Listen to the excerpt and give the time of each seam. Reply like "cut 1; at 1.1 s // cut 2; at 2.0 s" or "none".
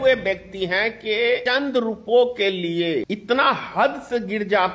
cut 1; at 1.4 s // cut 2; at 3.1 s